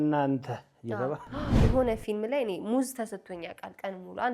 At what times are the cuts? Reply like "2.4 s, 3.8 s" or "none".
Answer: 1.6 s